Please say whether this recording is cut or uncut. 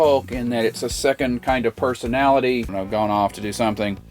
cut